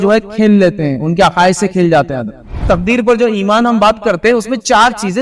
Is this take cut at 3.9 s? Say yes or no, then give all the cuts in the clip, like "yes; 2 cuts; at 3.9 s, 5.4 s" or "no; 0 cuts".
no; 1 cut; at 2.7 s